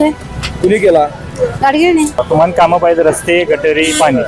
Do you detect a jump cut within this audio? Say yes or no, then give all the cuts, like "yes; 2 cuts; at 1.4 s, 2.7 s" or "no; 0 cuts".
yes; 1 cut; at 2.2 s